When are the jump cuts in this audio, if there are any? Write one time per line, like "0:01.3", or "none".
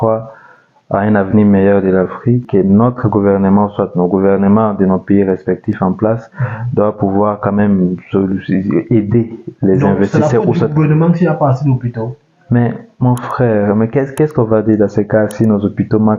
0:02.5

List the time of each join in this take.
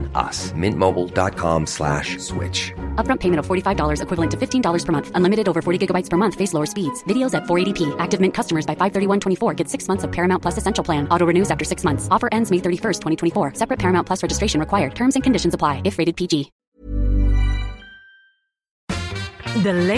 0:16.6
0:19.0

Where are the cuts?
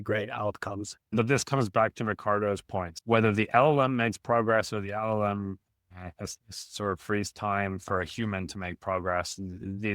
0:01.1
0:02.9

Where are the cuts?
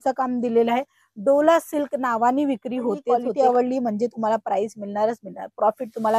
0:03.3

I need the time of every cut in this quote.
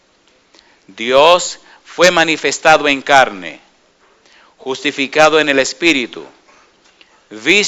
0:04.0

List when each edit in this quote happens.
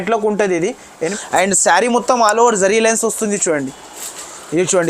0:01.1

